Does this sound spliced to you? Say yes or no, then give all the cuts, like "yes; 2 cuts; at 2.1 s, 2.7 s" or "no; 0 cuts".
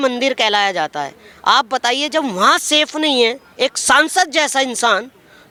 no; 0 cuts